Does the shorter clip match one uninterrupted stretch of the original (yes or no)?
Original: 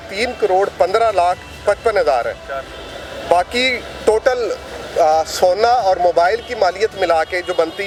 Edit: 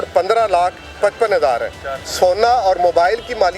no